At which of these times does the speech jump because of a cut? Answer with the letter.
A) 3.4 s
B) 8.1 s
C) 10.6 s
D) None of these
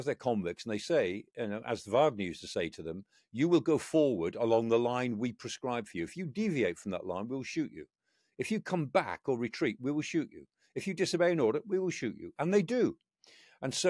D